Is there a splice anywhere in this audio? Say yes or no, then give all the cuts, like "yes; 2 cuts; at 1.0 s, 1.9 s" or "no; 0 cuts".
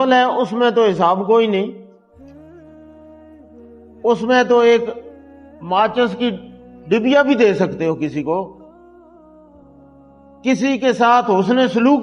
yes; 2 cuts; at 8.8 s, 10.4 s